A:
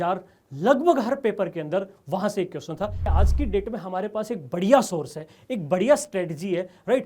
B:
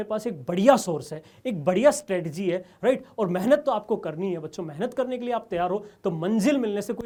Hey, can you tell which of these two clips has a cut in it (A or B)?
A